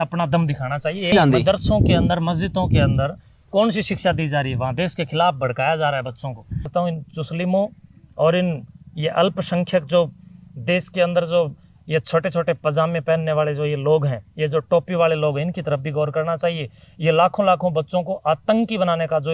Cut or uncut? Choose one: cut